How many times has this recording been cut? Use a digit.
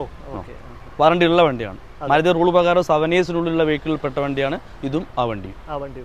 0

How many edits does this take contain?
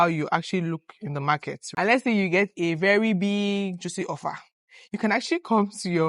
1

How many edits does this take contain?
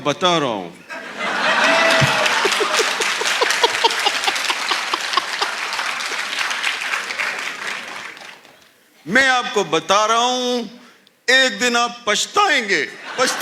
0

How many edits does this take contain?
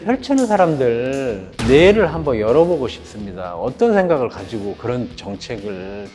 0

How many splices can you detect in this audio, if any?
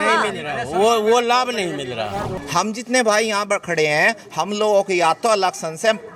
1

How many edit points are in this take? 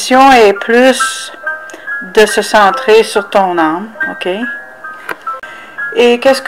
0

